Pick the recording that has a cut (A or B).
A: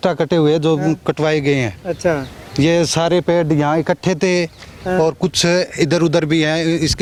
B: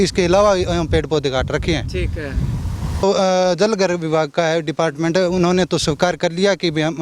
B